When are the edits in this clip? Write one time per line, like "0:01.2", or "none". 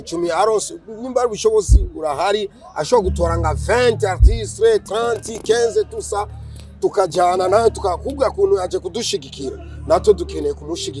none